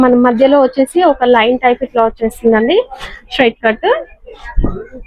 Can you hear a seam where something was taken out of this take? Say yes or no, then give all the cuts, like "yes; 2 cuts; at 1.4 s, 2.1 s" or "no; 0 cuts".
no; 0 cuts